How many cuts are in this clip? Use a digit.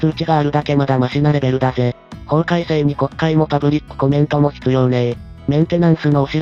0